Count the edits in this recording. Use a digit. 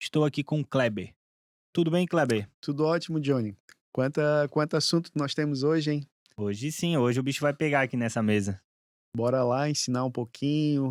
0